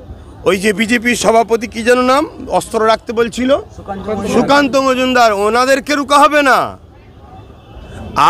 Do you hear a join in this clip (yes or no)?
no